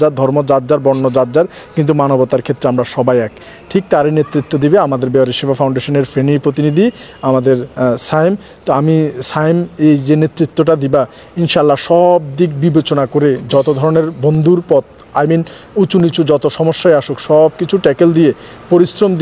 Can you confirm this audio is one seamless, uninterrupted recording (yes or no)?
yes